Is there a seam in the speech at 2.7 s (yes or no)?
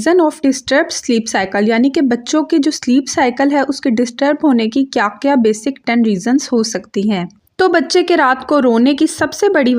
no